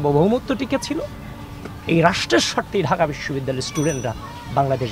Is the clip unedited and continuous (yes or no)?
yes